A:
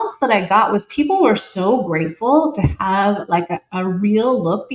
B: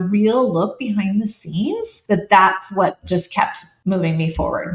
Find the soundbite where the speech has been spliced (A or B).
B